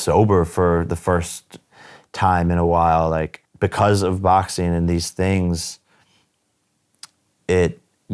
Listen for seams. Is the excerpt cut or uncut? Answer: cut